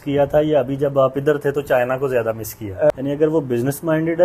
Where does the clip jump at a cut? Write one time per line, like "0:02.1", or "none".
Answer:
0:02.9